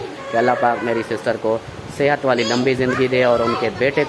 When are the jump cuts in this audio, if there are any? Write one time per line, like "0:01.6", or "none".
none